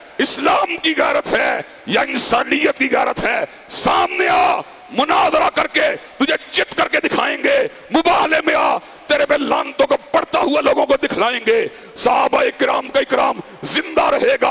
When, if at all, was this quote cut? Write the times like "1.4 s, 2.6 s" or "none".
none